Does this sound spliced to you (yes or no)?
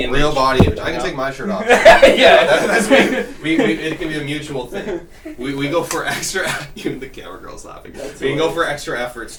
no